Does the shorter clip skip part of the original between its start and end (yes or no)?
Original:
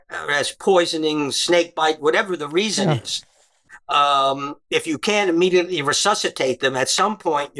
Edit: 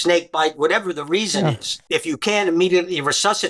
yes